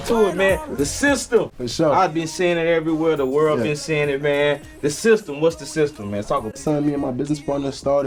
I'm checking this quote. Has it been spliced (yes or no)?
no